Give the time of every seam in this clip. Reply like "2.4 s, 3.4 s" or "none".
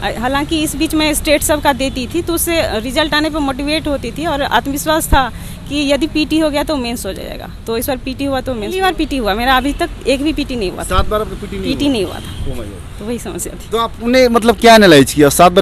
8.7 s